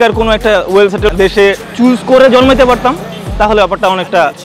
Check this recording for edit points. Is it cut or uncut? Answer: cut